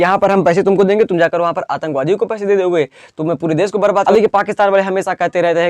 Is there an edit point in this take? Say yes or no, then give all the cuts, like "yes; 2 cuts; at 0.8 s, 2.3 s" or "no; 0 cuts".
yes; 1 cut; at 4.0 s